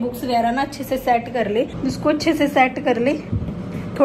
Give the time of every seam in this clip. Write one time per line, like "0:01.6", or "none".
0:01.7